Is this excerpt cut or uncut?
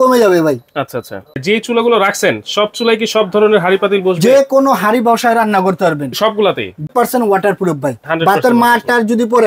cut